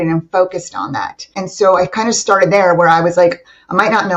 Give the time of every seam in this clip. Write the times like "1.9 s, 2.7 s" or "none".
1.4 s